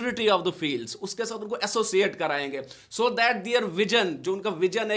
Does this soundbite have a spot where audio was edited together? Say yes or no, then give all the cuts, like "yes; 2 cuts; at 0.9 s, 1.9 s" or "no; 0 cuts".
no; 0 cuts